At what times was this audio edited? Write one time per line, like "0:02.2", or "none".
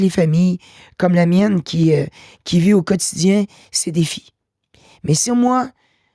none